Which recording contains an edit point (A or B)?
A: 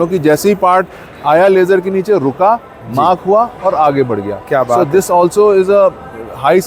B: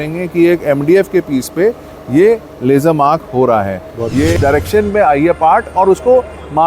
B